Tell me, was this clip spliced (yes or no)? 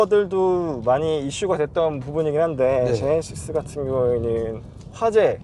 no